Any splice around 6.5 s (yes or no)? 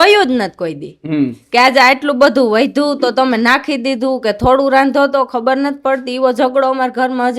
no